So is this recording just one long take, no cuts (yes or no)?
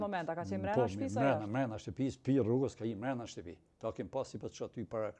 yes